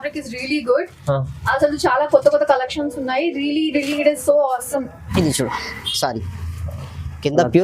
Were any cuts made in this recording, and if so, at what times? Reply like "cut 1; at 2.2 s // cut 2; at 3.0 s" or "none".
cut 1; at 5.0 s